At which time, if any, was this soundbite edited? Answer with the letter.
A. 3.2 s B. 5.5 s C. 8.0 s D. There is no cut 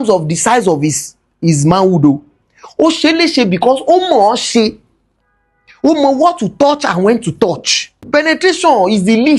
C